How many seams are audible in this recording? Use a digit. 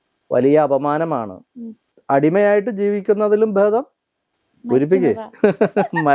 1